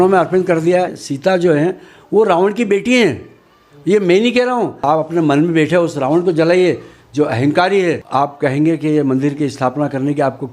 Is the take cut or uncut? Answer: cut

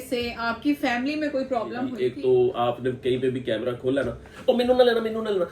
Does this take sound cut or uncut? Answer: cut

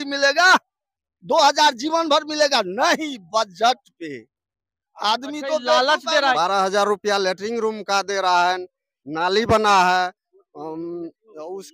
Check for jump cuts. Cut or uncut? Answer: cut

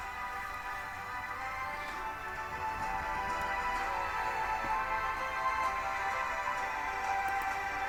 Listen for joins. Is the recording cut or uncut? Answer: uncut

